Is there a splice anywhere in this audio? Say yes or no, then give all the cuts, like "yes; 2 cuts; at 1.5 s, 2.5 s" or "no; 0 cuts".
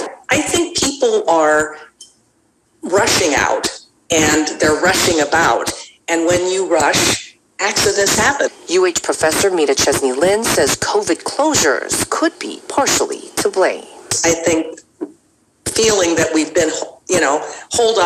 yes; 1 cut; at 13.0 s